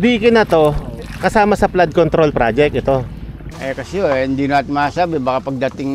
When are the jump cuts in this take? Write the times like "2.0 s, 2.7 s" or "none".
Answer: 3.4 s